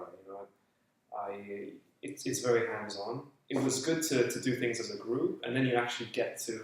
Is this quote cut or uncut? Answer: cut